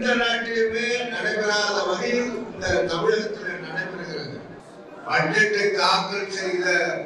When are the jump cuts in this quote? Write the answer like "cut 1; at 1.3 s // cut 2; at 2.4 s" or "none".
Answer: cut 1; at 4.6 s